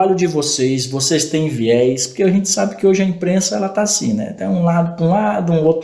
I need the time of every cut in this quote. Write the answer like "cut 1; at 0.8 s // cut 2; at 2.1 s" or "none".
none